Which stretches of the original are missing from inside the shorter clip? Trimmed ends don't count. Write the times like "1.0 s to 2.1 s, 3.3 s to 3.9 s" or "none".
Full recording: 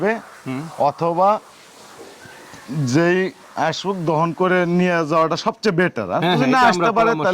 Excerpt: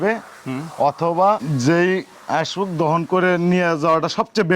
1.4 s to 2.7 s